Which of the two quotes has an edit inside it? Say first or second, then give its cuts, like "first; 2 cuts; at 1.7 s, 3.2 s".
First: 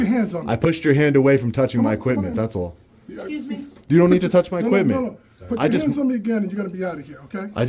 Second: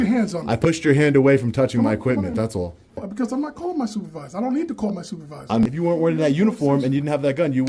second; 2 cuts; at 3.1 s, 5.6 s